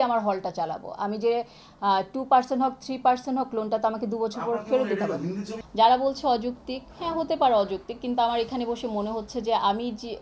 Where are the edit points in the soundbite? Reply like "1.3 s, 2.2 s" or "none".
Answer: 5.6 s